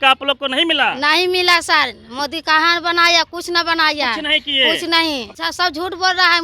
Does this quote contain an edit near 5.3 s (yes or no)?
yes